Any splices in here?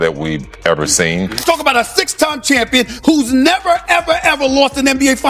yes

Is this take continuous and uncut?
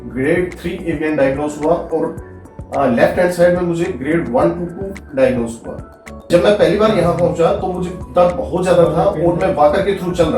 no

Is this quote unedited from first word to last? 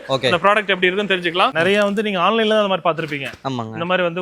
no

